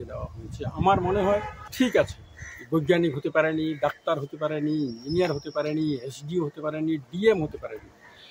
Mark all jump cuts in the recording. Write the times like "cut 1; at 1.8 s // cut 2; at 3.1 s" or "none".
cut 1; at 1.6 s